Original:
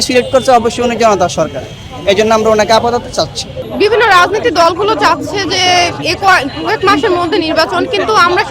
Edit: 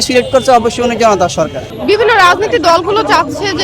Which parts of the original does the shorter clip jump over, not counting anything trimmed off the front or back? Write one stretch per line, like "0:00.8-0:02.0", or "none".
0:01.7-0:03.6